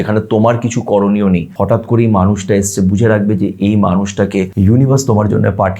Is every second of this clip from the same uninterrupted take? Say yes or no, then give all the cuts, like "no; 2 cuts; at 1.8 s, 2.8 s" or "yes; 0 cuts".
no; 2 cuts; at 1.5 s, 4.5 s